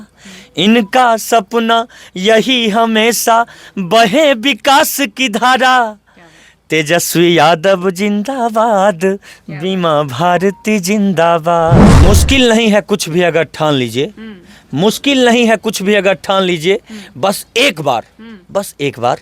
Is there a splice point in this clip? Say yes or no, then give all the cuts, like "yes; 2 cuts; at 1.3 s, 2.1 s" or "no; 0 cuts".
yes; 1 cut; at 11.9 s